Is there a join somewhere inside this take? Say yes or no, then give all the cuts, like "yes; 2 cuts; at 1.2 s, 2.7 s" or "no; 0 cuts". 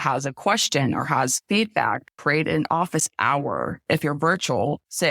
yes; 2 cuts; at 2.1 s, 3.8 s